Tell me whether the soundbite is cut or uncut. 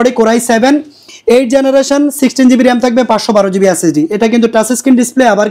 uncut